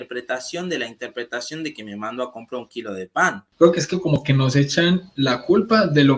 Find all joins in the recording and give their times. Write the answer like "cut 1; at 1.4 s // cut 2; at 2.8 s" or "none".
cut 1; at 3.4 s